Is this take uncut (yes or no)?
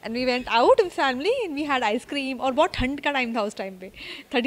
yes